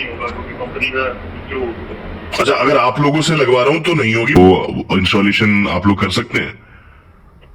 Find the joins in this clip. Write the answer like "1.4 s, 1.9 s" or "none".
3.9 s

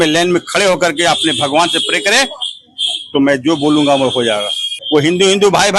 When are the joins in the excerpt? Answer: 4.7 s

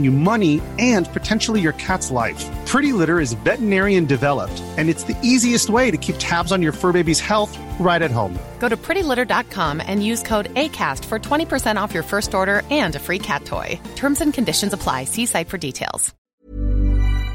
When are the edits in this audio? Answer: 16.1 s

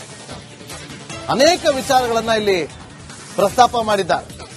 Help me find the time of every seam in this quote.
1.2 s

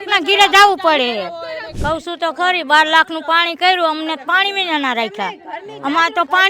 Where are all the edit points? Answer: 1.7 s

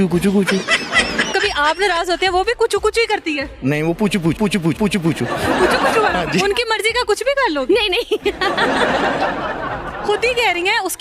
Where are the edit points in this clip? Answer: 1.3 s, 6.4 s

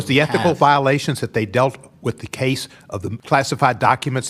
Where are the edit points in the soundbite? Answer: 3.2 s

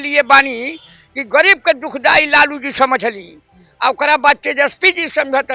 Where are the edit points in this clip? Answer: none

